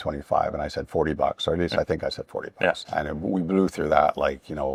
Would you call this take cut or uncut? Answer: uncut